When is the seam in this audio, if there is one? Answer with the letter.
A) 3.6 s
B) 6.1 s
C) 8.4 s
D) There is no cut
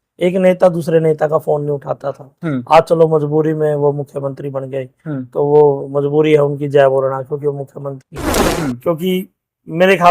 C